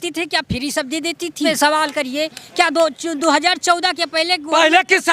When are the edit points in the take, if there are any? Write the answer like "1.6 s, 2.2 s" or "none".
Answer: 1.5 s